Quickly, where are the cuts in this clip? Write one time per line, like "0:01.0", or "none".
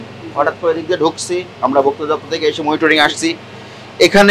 none